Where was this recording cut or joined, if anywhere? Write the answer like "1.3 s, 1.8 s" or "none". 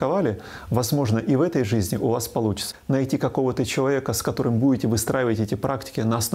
2.7 s